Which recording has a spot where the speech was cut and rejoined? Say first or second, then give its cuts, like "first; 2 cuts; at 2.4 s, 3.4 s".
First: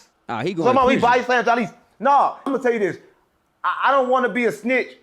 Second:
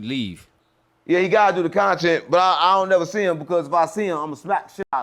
first; 1 cut; at 2.5 s